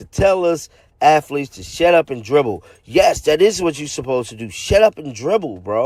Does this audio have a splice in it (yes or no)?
no